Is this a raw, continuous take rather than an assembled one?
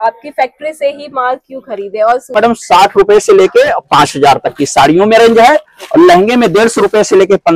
no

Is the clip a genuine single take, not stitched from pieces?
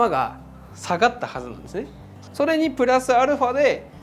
no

